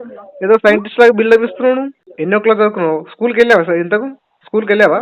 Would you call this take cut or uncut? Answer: cut